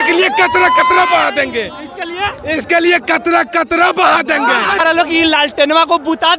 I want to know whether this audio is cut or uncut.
cut